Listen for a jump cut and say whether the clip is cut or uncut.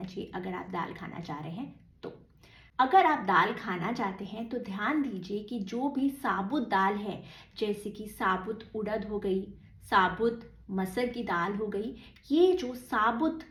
uncut